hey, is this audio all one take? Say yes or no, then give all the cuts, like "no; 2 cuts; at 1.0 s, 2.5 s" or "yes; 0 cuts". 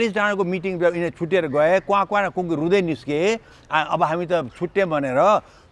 yes; 0 cuts